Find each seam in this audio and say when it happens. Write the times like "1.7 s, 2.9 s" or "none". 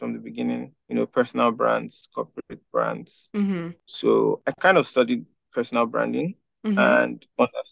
3.7 s